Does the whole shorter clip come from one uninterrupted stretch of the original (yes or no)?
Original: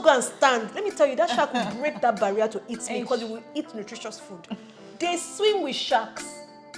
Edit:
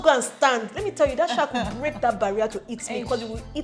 yes